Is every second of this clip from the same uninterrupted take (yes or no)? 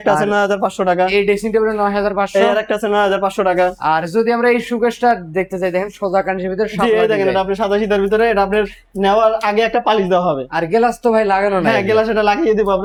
yes